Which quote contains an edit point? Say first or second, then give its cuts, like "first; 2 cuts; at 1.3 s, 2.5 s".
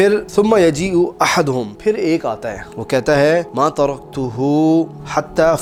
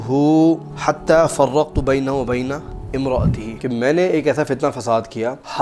second; 1 cut; at 3.6 s